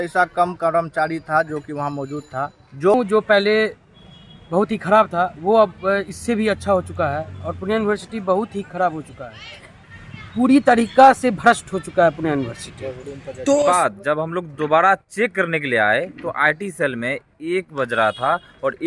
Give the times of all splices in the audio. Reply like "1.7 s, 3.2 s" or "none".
2.9 s, 9.8 s, 13.7 s

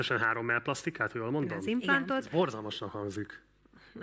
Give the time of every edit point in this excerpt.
1.6 s

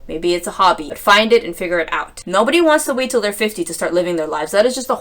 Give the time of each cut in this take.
2.2 s

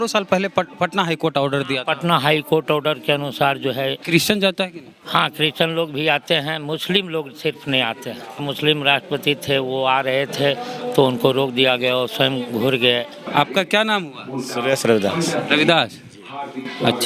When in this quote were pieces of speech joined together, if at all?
4.0 s, 8.4 s, 13.2 s

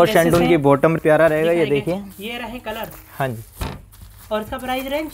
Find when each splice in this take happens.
1.0 s

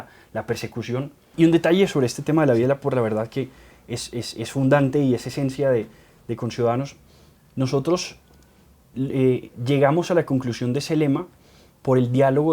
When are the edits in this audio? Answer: 1.3 s

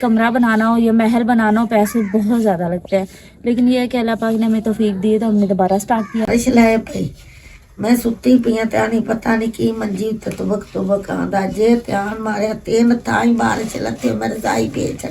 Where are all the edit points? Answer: 6.3 s

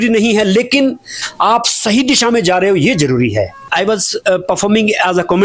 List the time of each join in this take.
3.6 s

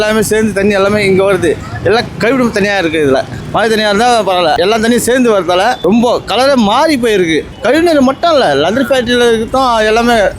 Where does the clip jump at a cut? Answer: 3.4 s, 4.5 s, 5.8 s, 7.5 s

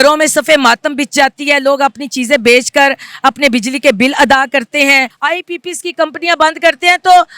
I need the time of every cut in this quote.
5.1 s

